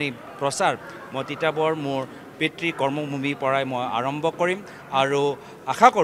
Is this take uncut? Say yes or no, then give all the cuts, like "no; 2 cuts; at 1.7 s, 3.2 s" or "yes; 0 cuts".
yes; 0 cuts